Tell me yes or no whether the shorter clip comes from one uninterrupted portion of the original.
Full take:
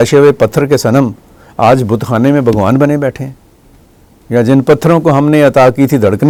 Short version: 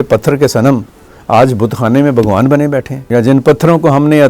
no